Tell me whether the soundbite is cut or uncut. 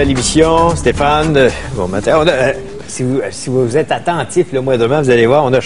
uncut